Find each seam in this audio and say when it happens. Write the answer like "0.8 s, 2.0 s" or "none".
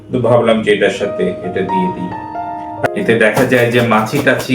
2.9 s

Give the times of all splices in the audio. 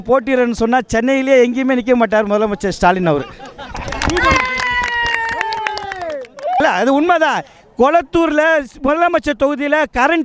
6.6 s

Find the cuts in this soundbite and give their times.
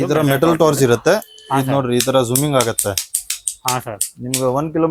none

